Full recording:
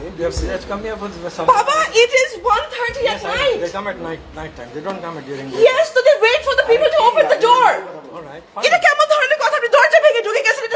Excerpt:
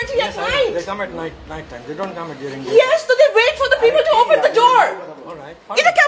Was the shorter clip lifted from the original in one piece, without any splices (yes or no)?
yes